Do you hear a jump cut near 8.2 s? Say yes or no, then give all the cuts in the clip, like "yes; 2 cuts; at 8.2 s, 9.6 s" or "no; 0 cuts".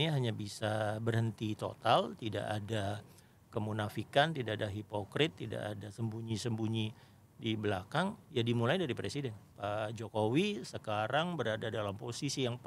no; 1 cut; at 9.5 s